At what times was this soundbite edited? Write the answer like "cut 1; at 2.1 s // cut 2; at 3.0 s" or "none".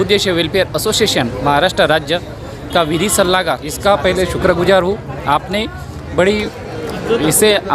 cut 1; at 3.7 s